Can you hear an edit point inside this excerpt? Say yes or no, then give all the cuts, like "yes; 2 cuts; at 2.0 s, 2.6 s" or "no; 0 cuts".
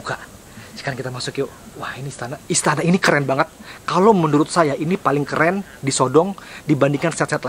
no; 0 cuts